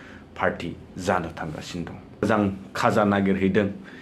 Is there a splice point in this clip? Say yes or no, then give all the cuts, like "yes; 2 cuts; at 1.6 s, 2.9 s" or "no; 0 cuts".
yes; 1 cut; at 2.2 s